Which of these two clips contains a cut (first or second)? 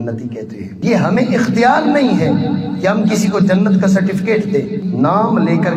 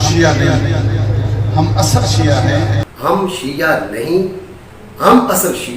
second